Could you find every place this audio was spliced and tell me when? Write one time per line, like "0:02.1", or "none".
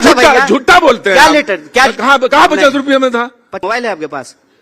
0:03.5